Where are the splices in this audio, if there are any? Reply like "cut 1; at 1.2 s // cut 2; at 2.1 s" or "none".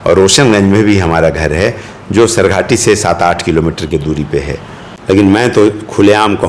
cut 1; at 4.9 s